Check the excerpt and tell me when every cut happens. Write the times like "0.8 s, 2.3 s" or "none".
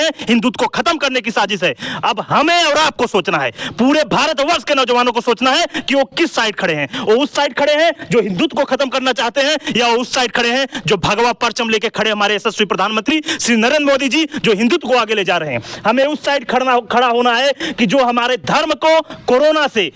none